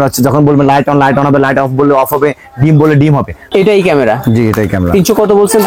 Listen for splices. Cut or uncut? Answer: cut